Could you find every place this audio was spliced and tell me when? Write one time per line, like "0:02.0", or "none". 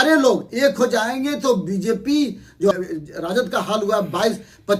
0:02.7